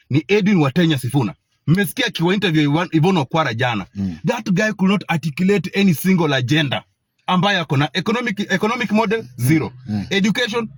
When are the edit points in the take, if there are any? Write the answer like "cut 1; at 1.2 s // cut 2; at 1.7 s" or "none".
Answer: none

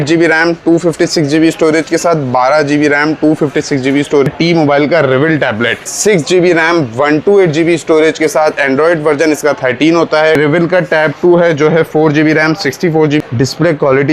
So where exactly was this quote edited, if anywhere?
cut 1; at 4.3 s // cut 2; at 5.9 s // cut 3; at 10.4 s // cut 4; at 13.2 s

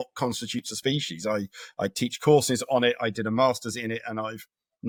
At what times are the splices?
none

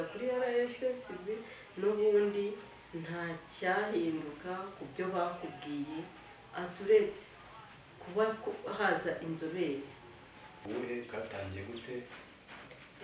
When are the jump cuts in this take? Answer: cut 1; at 10.6 s

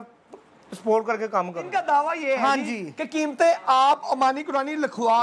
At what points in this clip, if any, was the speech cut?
cut 1; at 1.6 s

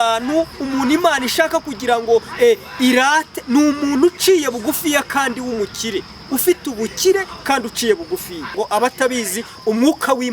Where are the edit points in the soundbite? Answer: cut 1; at 8.5 s

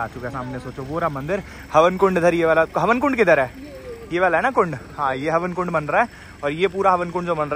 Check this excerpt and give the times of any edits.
none

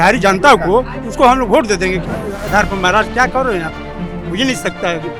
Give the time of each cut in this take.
cut 1; at 2.1 s

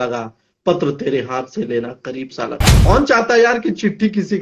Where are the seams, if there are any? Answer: cut 1; at 2.7 s

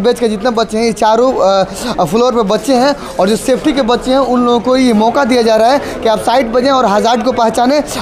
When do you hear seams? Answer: none

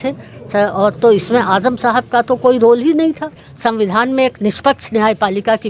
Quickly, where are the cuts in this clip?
cut 1; at 3.5 s

